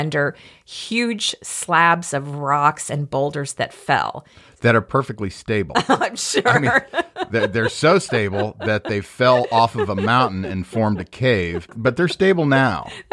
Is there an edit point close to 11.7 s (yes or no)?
yes